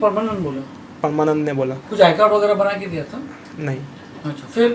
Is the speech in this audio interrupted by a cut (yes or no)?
no